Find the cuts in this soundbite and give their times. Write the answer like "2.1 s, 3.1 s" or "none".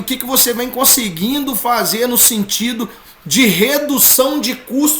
none